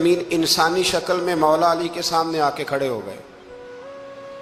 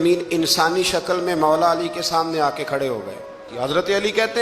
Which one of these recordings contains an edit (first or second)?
second